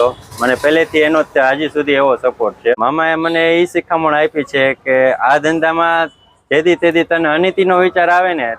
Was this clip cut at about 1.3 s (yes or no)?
no